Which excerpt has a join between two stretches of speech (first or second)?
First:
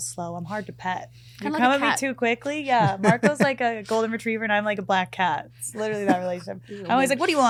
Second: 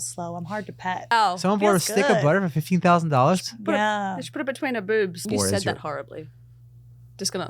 second